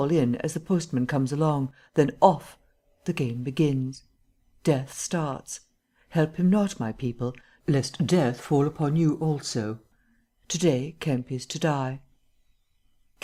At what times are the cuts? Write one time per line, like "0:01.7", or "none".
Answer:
none